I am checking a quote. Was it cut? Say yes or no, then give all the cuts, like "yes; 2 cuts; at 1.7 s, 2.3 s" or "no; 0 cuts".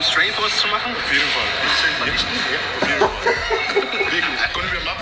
no; 0 cuts